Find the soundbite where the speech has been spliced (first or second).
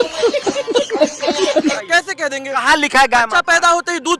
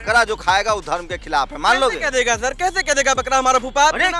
first